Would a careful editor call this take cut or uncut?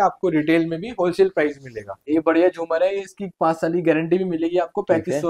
cut